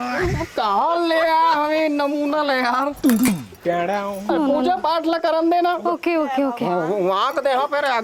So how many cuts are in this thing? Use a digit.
0